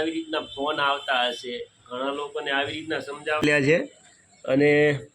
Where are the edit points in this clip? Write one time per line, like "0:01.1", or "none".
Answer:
0:03.4